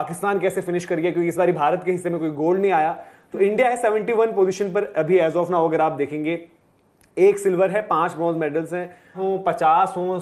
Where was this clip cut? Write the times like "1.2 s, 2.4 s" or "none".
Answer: 9.2 s